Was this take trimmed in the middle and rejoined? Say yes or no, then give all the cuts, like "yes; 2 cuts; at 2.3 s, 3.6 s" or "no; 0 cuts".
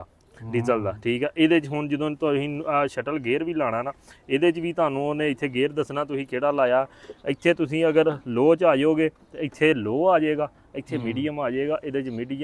no; 0 cuts